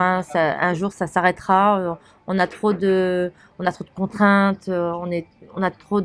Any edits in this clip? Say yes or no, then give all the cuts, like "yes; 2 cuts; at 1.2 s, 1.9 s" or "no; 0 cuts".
no; 0 cuts